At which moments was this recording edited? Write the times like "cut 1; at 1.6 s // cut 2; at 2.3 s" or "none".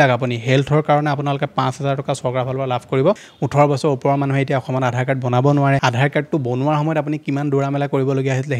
cut 1; at 3.3 s // cut 2; at 5.8 s